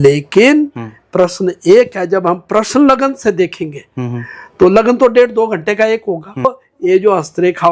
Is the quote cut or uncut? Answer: cut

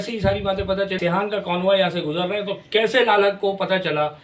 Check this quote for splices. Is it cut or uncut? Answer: cut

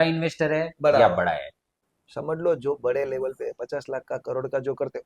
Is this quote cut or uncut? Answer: cut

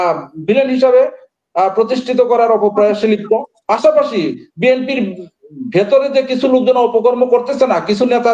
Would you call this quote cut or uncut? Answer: uncut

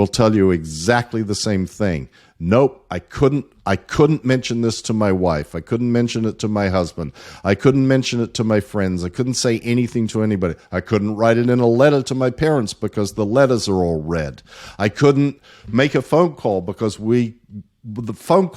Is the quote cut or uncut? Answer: uncut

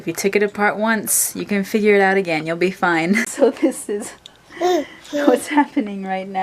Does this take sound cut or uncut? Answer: cut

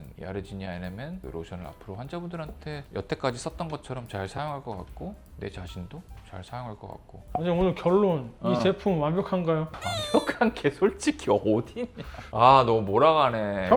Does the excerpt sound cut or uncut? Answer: uncut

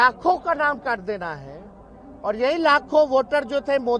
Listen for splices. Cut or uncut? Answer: uncut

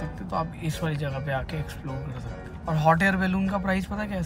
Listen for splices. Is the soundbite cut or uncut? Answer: cut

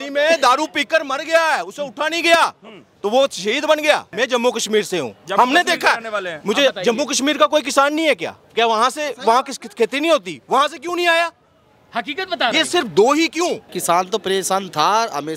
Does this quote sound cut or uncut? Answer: cut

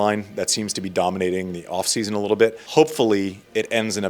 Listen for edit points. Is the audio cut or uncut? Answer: cut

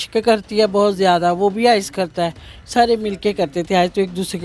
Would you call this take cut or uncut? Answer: uncut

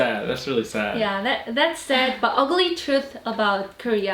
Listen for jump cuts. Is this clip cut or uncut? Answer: uncut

